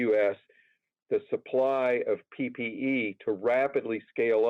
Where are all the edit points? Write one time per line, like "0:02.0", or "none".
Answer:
none